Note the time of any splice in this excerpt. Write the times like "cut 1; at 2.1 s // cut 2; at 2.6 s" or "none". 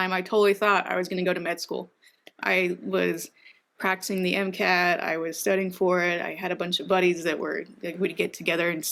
none